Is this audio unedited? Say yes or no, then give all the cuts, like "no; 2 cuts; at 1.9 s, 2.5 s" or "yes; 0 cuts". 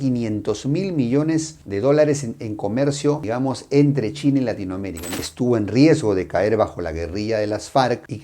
no; 1 cut; at 5.2 s